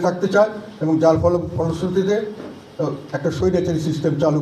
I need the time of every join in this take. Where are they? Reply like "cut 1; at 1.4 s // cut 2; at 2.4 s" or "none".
none